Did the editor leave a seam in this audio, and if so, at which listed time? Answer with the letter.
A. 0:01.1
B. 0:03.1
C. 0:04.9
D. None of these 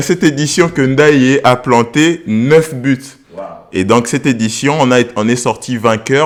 D